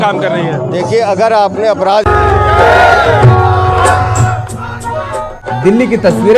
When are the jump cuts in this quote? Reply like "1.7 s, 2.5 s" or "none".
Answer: 5.4 s